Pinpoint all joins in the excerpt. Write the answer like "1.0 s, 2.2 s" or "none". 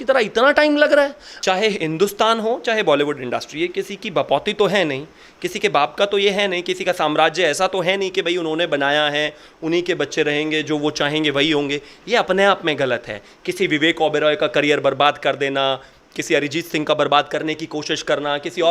1.3 s

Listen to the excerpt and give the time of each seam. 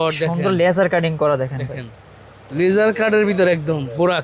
none

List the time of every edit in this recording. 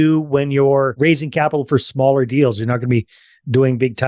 0.9 s

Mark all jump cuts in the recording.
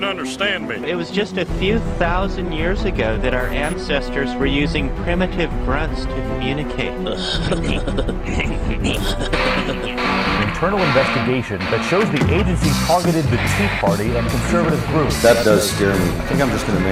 none

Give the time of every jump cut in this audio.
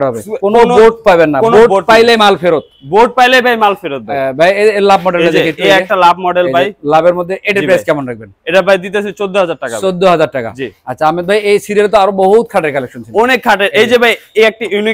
none

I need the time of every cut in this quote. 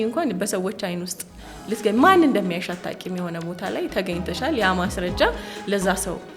none

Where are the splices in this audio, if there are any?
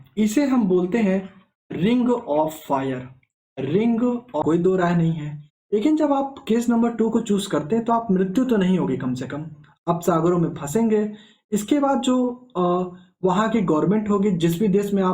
4.4 s

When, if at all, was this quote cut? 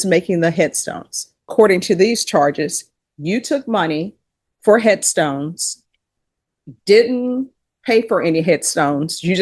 1.5 s

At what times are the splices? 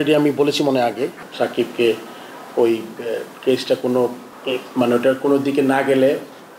1.2 s, 4.3 s

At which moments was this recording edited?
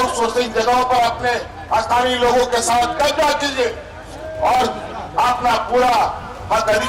none

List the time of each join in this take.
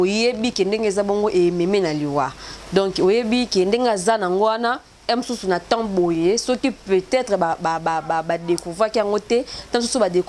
none

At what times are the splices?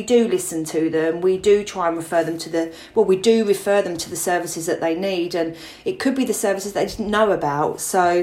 none

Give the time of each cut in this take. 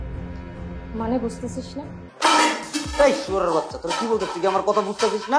2.0 s

